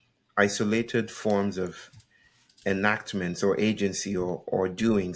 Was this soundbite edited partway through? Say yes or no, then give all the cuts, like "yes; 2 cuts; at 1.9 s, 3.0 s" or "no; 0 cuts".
no; 0 cuts